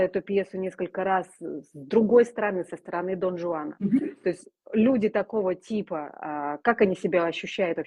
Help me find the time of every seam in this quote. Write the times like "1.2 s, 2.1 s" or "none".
none